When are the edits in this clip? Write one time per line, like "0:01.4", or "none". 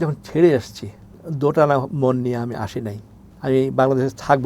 0:01.2

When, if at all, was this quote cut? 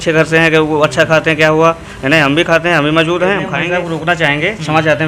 0:03.5

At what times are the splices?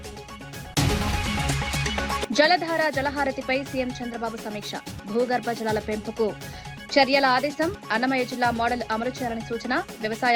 0:00.7
0:02.2

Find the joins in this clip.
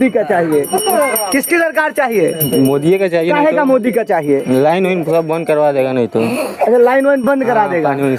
none

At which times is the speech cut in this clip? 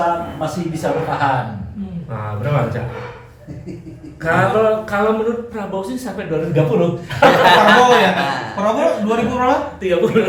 none

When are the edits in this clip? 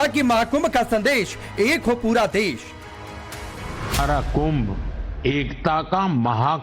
0:02.1

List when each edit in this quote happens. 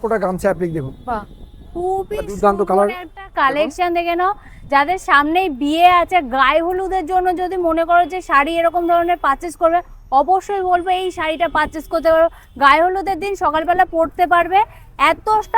none

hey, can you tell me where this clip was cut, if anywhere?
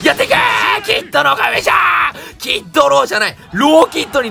none

